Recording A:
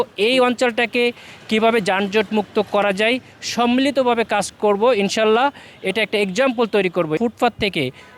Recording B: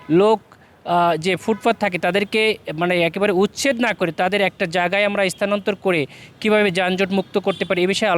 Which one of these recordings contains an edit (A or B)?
A